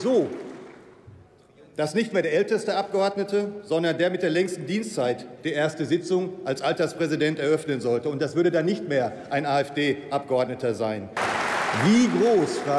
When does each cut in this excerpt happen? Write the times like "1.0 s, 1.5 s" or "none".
11.2 s